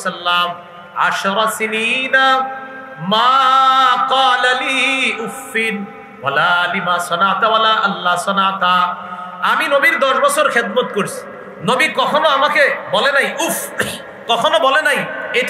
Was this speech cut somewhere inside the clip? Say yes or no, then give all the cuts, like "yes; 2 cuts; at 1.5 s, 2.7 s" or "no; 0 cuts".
no; 0 cuts